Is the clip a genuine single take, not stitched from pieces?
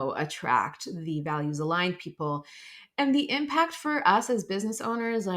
yes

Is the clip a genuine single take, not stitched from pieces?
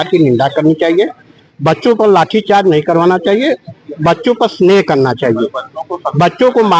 yes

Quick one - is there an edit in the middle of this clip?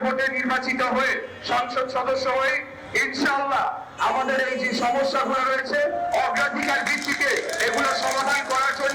no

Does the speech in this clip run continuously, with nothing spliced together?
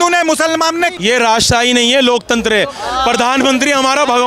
no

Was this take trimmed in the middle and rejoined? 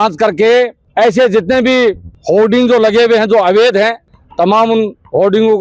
yes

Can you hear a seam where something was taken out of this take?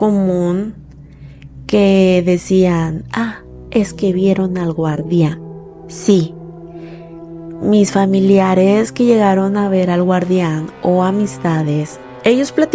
no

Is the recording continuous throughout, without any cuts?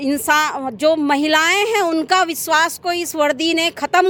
yes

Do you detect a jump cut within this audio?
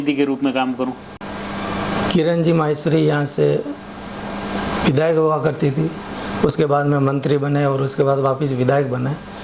no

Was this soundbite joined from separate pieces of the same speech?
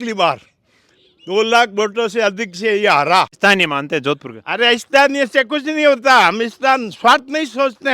yes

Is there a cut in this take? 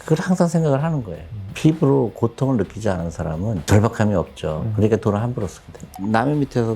yes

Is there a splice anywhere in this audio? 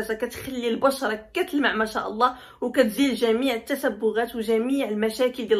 no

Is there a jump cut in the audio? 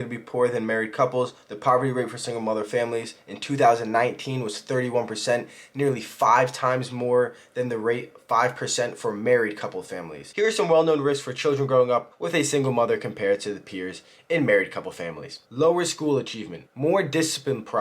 yes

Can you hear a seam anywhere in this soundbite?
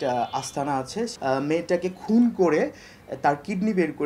yes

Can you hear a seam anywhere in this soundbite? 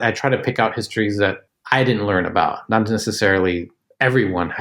yes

